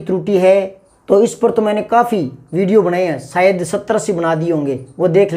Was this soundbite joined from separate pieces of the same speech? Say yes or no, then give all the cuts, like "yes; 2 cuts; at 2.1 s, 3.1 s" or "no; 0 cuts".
no; 0 cuts